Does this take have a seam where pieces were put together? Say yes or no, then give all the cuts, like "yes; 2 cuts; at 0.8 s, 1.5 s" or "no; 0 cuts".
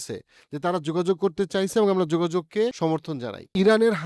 yes; 1 cut; at 3.1 s